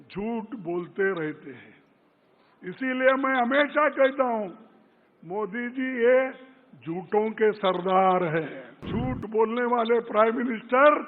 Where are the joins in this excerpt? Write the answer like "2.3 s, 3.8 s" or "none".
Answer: 8.9 s